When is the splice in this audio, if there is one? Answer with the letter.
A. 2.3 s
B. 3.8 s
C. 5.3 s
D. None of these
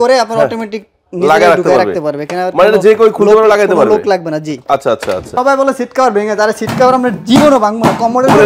C